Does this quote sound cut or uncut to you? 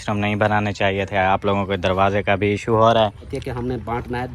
cut